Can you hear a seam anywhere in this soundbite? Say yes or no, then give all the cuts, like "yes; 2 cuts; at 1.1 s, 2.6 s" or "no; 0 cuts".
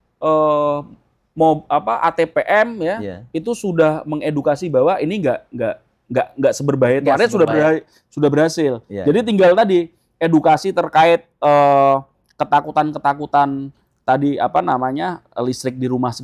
no; 0 cuts